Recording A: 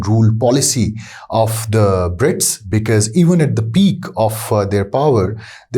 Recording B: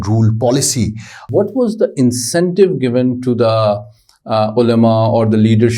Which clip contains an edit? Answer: B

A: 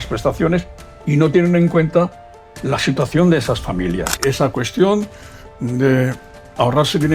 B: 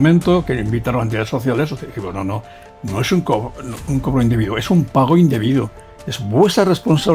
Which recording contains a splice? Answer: A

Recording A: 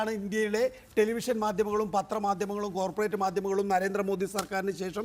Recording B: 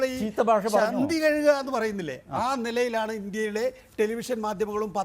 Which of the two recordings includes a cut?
B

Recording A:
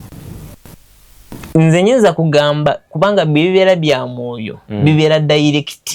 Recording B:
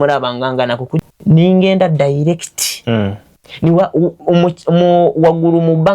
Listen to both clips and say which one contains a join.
B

